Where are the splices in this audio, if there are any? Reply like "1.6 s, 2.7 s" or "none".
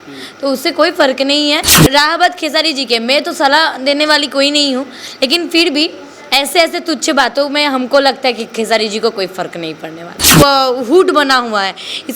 1.8 s, 10.3 s